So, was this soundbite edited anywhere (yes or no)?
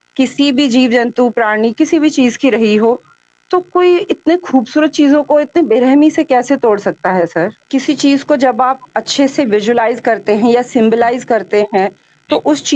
yes